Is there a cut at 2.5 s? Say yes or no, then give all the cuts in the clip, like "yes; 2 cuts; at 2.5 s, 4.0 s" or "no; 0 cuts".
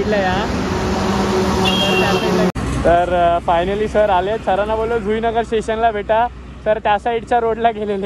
yes; 1 cut; at 2.5 s